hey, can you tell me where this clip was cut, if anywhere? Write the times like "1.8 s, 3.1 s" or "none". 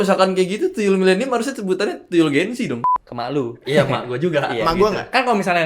2.8 s